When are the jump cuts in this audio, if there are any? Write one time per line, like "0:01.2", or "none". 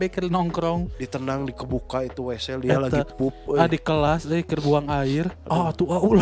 0:01.0
0:05.4